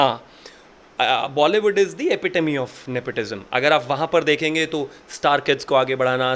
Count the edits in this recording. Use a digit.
0